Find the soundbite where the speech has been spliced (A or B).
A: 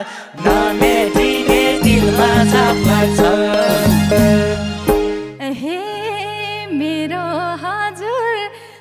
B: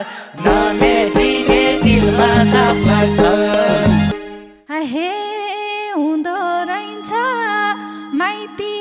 A